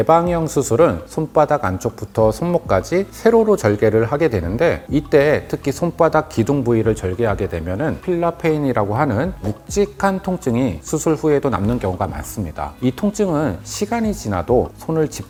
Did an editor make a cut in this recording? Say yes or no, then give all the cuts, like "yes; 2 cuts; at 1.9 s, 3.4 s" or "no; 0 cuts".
no; 0 cuts